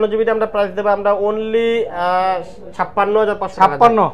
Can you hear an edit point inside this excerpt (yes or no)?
no